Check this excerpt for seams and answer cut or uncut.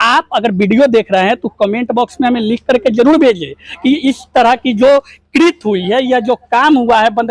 uncut